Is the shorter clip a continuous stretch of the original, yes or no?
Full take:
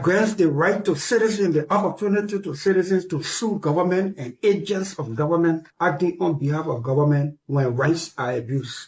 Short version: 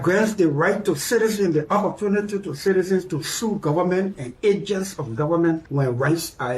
no